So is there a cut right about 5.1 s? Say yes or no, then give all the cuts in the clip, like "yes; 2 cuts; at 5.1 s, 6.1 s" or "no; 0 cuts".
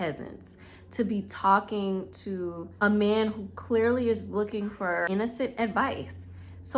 yes; 2 cuts; at 2.6 s, 5.1 s